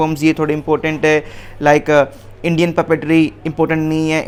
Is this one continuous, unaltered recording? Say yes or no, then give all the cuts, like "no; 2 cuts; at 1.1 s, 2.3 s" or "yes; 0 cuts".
yes; 0 cuts